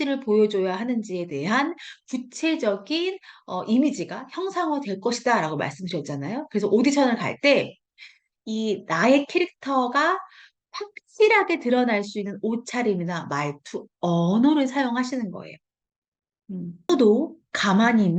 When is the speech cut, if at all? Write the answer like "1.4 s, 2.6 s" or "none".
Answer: 16.9 s